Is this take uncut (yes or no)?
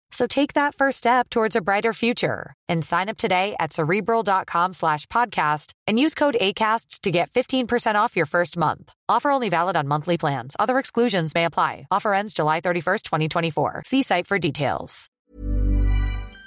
no